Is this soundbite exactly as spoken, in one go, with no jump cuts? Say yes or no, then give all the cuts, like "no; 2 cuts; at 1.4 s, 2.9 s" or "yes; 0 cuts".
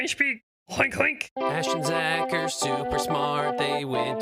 no; 1 cut; at 1.3 s